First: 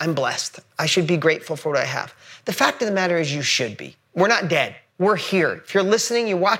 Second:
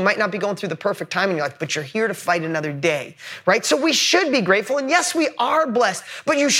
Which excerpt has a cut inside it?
first; 1 cut; at 4.8 s

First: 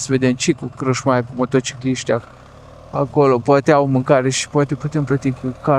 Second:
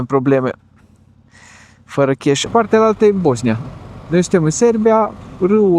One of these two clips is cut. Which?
second; 1 cut; at 2.4 s

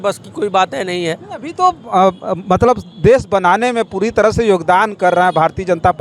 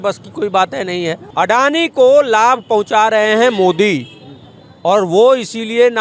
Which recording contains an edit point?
second; 1 cut; at 1.2 s

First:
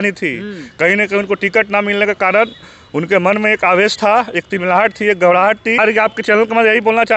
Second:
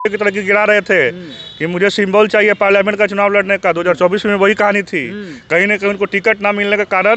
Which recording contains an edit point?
first; 1 cut; at 5.8 s

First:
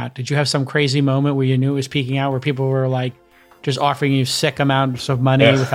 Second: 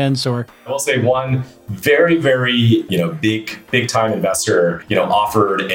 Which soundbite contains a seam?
second; 3 cuts; at 0.8 s, 2.9 s, 4.8 s

